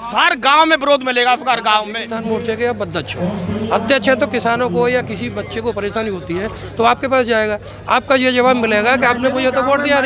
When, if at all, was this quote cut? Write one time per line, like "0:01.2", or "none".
0:02.1